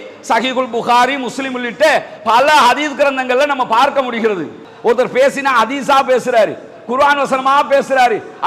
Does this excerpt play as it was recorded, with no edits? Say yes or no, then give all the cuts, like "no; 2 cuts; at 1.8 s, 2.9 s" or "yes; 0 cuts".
no; 1 cut; at 4.6 s